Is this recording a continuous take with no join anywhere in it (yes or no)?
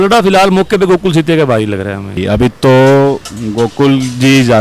no